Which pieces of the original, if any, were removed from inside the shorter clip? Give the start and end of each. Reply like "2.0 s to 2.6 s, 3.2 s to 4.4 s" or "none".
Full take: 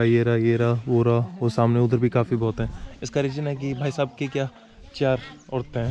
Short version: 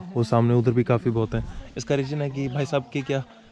none